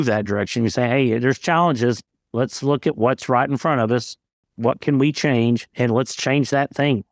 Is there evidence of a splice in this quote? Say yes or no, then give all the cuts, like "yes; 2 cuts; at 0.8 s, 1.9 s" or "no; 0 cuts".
yes; 1 cut; at 5.7 s